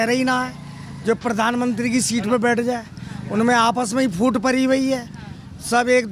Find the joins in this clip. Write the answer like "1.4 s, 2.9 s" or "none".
none